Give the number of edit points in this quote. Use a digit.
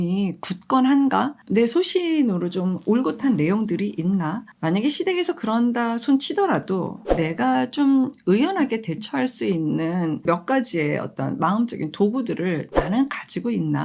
4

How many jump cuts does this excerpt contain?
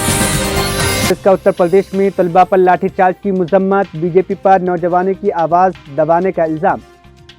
1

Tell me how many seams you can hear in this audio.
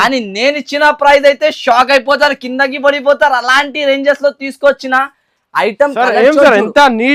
0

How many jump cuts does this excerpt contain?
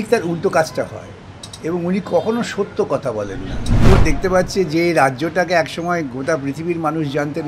1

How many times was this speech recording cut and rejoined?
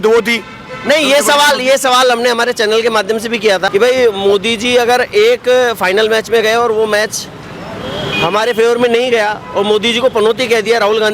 0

